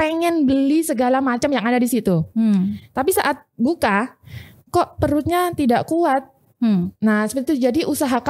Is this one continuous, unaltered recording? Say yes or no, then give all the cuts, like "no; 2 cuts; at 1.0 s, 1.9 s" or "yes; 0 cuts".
yes; 0 cuts